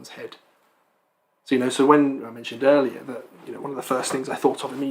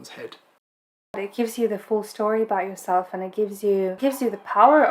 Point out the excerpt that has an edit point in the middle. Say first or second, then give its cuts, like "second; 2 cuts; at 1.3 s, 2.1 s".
second; 2 cuts; at 1.2 s, 4.0 s